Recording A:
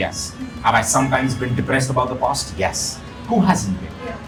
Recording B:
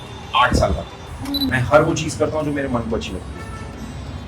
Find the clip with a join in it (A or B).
B